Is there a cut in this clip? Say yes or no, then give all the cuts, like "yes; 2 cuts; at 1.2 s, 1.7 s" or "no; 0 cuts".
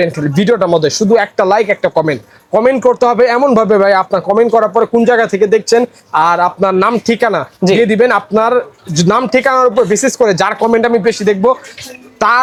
no; 0 cuts